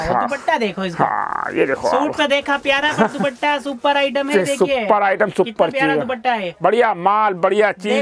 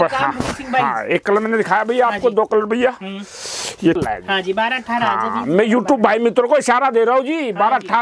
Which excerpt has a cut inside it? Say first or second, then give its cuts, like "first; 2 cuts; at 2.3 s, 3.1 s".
second; 1 cut; at 4.0 s